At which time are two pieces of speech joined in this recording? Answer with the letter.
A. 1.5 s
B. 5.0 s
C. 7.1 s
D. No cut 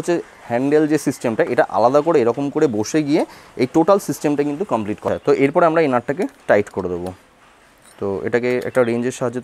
B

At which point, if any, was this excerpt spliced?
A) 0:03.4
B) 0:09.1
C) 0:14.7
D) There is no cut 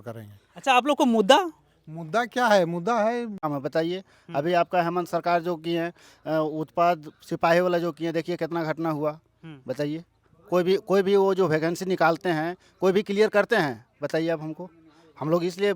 A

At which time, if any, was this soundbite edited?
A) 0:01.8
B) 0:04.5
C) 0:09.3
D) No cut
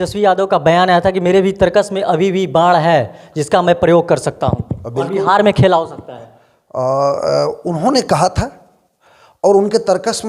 D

